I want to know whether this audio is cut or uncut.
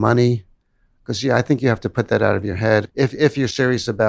cut